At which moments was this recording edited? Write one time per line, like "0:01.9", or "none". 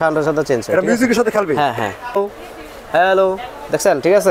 0:02.2